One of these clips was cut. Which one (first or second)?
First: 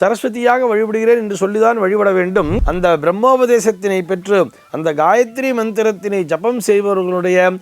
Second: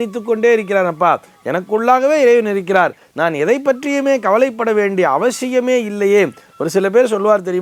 first